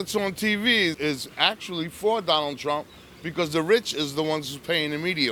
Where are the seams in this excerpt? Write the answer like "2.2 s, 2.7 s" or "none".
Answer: 1.0 s